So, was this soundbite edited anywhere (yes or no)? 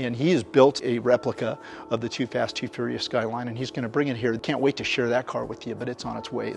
yes